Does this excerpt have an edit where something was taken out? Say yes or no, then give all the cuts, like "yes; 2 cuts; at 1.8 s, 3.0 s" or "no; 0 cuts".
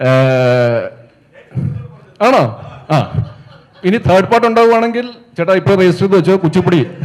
no; 0 cuts